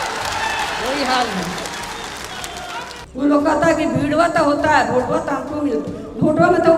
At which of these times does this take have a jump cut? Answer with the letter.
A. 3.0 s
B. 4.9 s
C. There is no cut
A